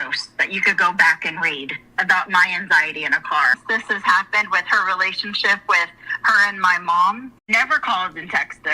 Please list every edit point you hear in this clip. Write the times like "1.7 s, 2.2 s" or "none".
3.6 s, 7.3 s